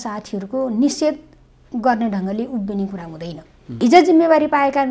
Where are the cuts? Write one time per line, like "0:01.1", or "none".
0:03.8